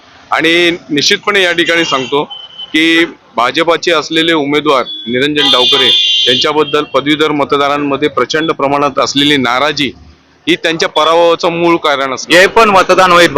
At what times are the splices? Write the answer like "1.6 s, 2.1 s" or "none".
12.1 s